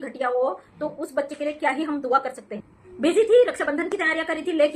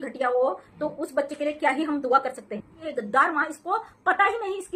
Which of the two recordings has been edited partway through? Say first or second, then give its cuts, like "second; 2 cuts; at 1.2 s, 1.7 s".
second; 1 cut; at 2.8 s